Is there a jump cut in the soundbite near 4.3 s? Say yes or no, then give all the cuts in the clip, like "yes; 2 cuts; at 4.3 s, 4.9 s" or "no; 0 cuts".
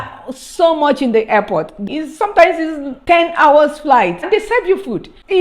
yes; 2 cuts; at 1.8 s, 4.3 s